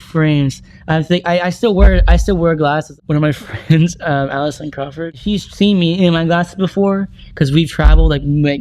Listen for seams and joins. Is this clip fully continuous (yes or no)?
no